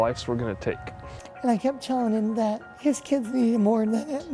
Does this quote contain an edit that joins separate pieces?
yes; 2 cuts; at 0.9 s, 2.7 s

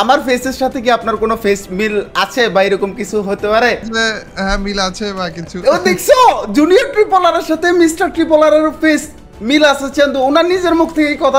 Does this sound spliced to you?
yes; 1 cut; at 3.9 s

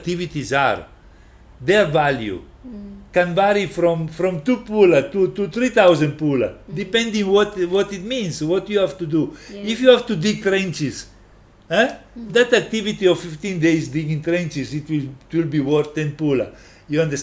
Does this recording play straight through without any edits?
yes; 0 cuts

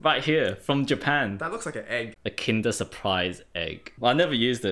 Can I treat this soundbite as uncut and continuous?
no; 2 cuts; at 2.1 s, 3.9 s

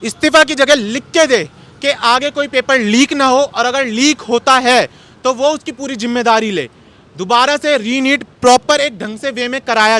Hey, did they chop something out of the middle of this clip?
no; 0 cuts

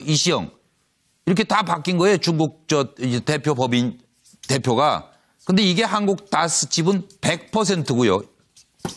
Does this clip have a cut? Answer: no; 0 cuts

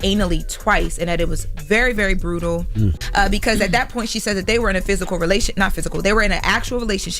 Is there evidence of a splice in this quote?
yes; 1 cut; at 3.0 s

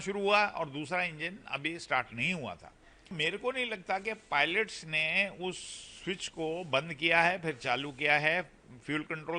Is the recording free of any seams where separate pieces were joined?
no; 1 cut; at 3.1 s

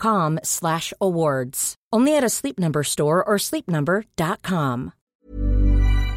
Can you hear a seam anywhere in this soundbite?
yes; 1 cut; at 5.0 s

